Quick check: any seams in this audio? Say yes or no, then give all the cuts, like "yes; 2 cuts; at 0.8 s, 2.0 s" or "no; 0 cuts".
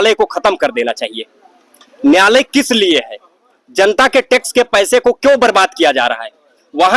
no; 0 cuts